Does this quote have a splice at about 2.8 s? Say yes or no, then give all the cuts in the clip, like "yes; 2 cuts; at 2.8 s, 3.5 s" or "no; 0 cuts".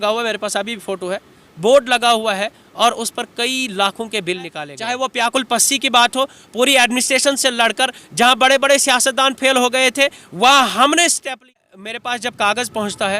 no; 2 cuts; at 4.7 s, 11.4 s